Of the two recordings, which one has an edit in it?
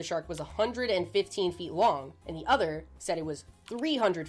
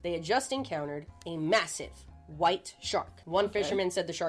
second; 1 cut; at 3.2 s

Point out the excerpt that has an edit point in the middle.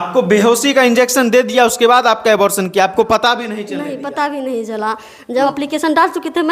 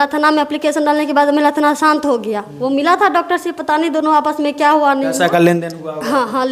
first; 1 cut; at 5.4 s

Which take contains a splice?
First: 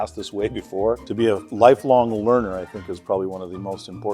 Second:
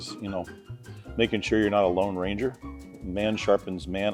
first; 1 cut; at 1.0 s

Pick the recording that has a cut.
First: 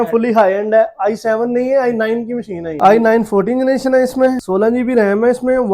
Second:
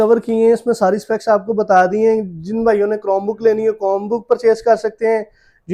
first; 2 cuts; at 2.7 s, 4.4 s

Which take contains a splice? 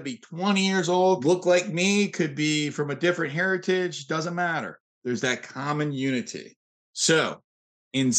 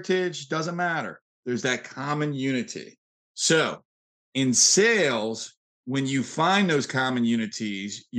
first; 1 cut; at 1.2 s

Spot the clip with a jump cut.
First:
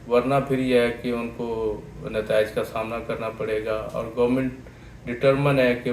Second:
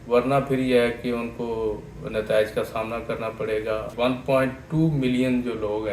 second; 1 cut; at 3.9 s

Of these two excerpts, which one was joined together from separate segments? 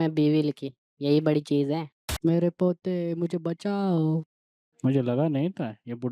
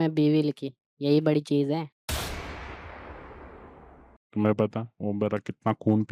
first; 1 cut; at 2.0 s

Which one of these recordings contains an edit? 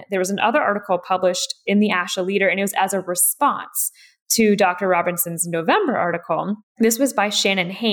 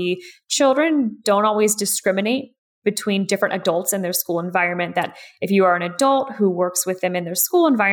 first; 1 cut; at 6.7 s

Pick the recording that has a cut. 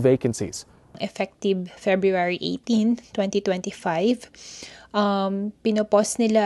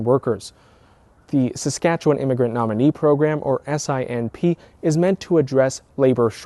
first; 1 cut; at 1.0 s

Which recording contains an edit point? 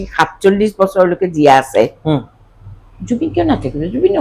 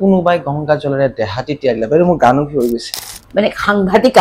second; 1 cut; at 2.9 s

